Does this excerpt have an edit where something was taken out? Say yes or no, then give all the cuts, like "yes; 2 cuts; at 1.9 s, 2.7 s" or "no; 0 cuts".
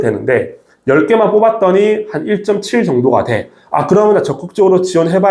no; 0 cuts